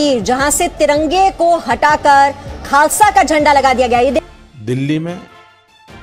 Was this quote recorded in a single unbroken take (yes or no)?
no